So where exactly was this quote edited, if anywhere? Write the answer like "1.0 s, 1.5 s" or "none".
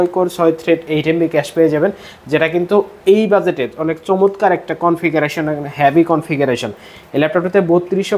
none